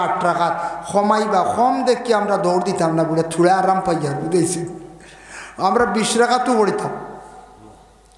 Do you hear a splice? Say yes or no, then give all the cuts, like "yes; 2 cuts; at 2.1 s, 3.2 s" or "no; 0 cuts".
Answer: no; 0 cuts